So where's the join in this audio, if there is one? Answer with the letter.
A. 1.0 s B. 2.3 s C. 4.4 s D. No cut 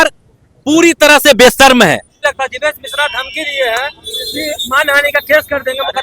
B